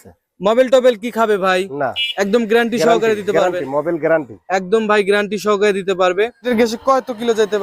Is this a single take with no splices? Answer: no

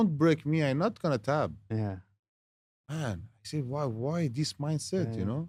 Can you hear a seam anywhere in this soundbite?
no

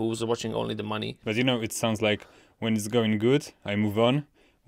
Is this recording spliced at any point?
yes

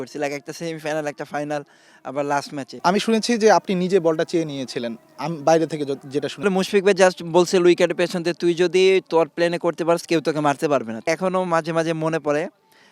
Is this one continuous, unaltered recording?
no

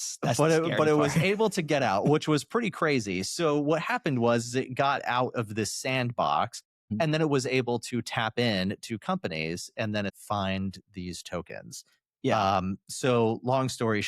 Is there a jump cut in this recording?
yes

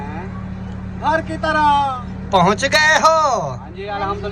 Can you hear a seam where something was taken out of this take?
yes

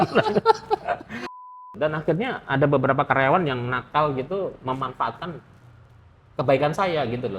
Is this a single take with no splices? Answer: no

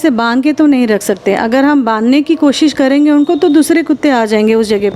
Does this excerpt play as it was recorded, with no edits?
yes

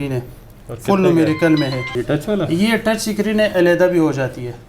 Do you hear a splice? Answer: yes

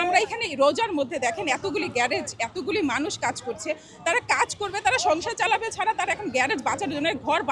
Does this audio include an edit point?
no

